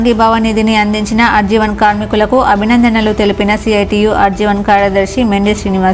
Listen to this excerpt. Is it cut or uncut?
uncut